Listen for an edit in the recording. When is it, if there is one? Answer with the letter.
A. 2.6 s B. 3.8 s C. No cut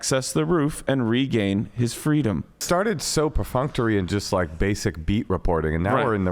A